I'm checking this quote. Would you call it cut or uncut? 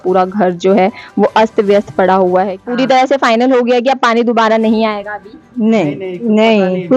cut